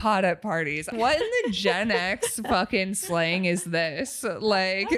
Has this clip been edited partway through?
yes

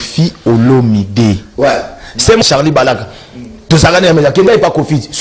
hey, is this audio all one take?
no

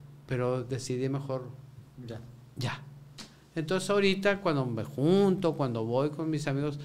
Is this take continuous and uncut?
yes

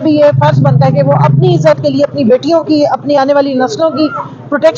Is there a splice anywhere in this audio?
no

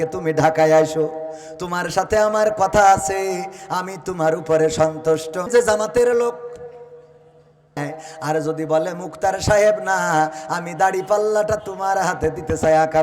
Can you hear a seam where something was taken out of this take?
yes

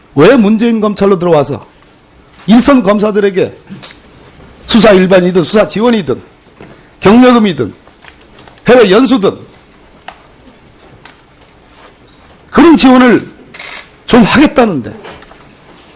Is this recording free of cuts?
no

